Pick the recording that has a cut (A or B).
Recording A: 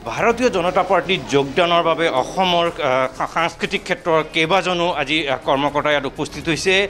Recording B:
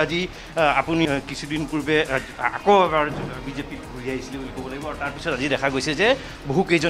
B